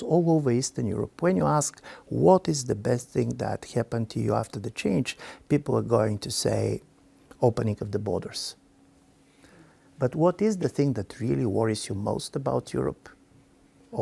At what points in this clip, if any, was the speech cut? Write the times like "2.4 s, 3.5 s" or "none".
none